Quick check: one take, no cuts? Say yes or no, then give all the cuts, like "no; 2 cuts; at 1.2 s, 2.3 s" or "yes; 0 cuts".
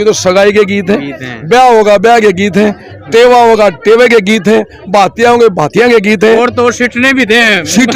yes; 0 cuts